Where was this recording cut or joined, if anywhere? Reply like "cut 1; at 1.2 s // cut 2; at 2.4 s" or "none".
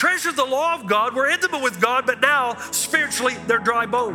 none

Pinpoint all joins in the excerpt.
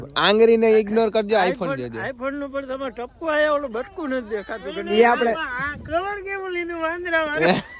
none

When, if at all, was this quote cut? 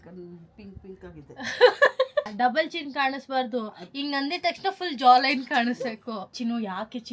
cut 1; at 2.3 s // cut 2; at 6.3 s

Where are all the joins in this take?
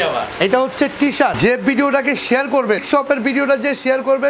cut 1; at 1.4 s // cut 2; at 2.8 s

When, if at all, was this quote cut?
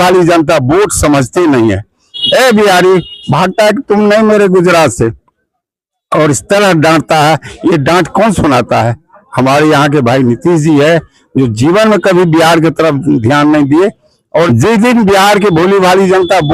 cut 1; at 2.1 s // cut 2; at 14.5 s

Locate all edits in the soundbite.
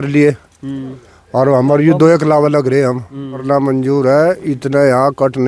cut 1; at 3.4 s

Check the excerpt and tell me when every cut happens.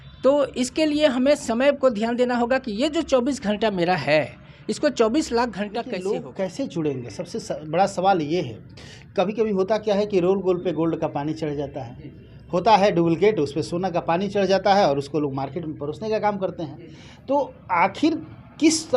cut 1; at 5.9 s

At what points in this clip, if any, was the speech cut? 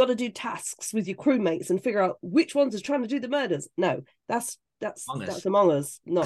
none

